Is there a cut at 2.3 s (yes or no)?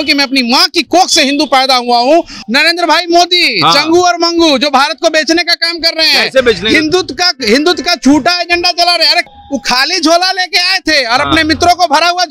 yes